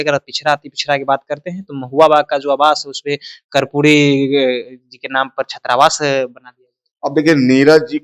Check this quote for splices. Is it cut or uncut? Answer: uncut